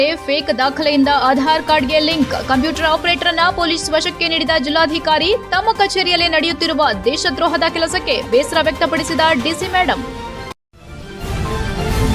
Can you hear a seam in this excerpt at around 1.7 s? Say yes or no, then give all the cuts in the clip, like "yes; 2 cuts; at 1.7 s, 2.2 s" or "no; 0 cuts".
no; 1 cut; at 10.5 s